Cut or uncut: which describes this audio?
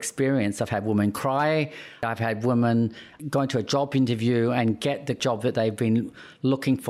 cut